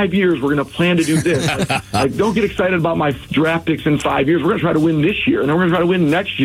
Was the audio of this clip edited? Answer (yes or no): no